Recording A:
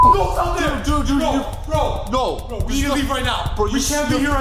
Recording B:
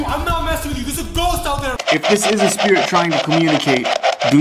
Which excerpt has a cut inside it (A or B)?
B